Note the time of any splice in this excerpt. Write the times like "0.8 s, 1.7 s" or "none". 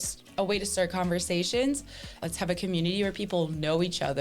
2.1 s

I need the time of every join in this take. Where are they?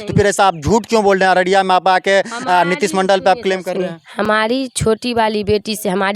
none

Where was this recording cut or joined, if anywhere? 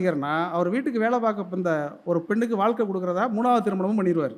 none

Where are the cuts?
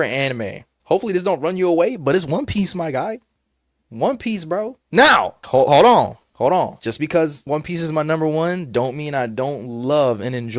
4.8 s, 5.4 s

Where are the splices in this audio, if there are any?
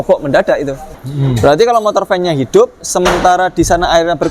1.0 s

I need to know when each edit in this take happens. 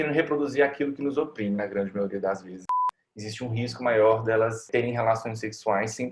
2.7 s, 4.7 s

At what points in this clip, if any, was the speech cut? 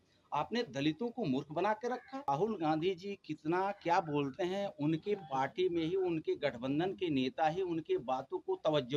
2.3 s

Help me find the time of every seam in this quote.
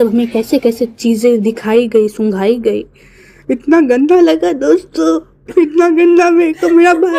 none

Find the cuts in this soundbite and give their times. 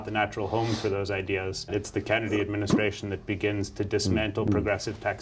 1.7 s

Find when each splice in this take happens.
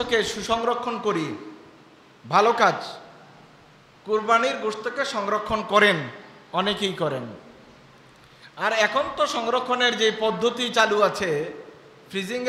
none

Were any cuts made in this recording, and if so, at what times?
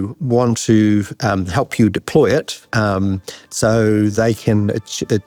none

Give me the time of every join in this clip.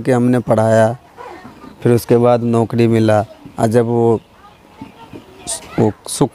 none

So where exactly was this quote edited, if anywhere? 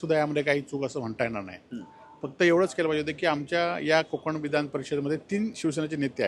none

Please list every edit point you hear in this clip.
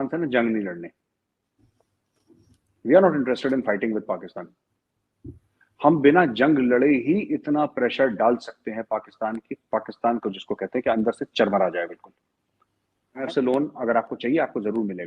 13.2 s

